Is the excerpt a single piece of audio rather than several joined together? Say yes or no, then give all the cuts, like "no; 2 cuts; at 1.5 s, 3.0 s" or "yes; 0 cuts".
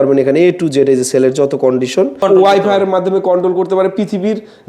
no; 1 cut; at 2.2 s